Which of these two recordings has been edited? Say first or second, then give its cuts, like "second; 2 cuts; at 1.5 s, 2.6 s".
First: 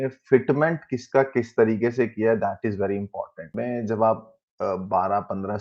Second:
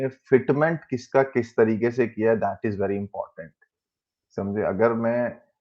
first; 1 cut; at 3.5 s